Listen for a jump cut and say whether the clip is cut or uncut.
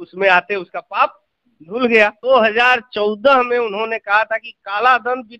cut